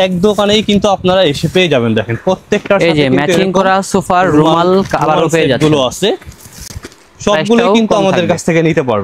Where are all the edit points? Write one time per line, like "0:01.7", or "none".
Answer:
none